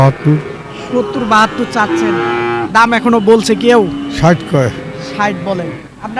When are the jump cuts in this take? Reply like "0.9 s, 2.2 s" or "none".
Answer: none